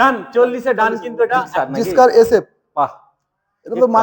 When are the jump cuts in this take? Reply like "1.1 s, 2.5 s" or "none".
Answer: 1.5 s